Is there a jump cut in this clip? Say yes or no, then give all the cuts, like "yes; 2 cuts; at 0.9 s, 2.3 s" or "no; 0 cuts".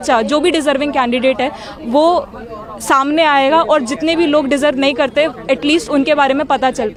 no; 0 cuts